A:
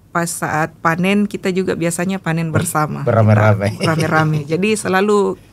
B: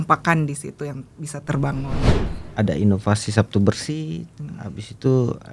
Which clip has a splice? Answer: B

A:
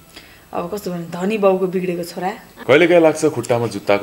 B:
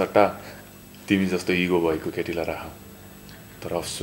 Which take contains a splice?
A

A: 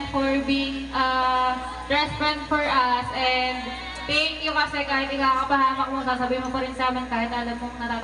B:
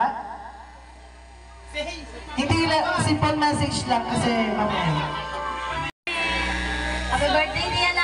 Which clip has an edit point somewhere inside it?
B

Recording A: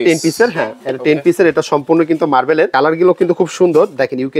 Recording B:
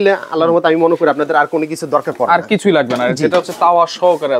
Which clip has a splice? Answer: A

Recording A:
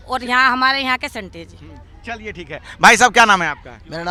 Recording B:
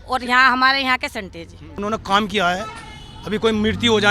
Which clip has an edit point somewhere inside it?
B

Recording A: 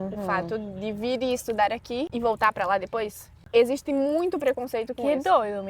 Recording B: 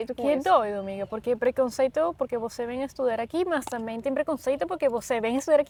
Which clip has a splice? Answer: A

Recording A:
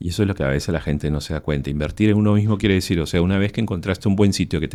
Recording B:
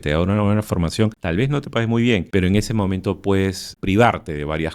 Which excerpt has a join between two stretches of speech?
B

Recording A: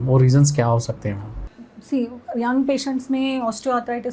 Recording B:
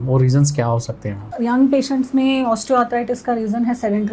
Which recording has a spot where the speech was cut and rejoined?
B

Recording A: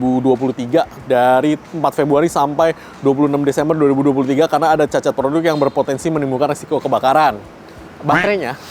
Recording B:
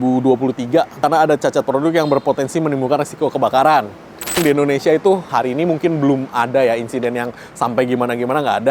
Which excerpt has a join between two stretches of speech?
B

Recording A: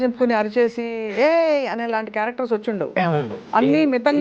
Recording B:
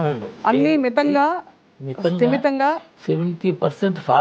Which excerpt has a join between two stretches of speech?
B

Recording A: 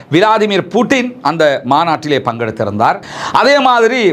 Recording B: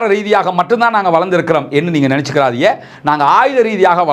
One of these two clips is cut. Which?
A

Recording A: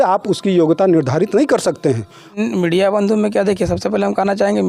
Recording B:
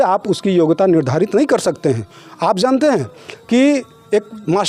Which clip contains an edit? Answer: A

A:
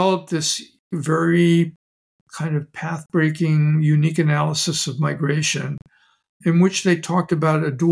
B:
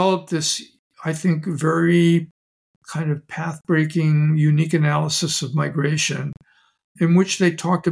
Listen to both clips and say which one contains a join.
A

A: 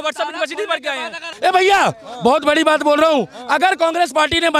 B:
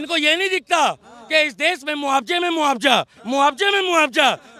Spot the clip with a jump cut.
A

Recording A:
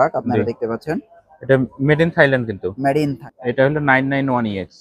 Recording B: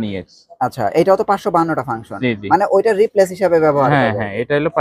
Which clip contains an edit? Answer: A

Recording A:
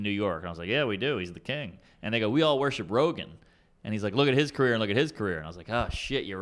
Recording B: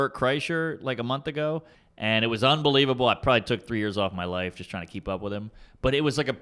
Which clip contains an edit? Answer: B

